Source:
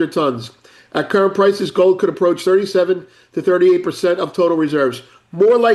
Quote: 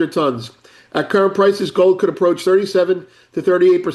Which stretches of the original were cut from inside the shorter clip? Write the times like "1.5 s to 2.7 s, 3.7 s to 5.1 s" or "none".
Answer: none